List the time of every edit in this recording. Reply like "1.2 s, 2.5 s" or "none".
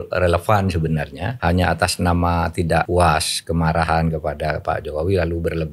1.2 s, 2.9 s

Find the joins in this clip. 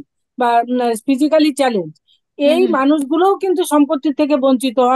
none

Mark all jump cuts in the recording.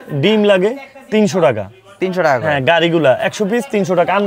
none

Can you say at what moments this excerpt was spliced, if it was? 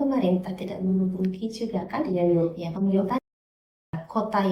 none

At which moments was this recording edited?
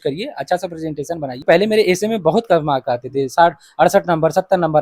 1.3 s

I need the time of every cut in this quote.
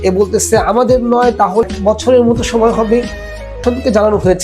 1.7 s, 3.6 s

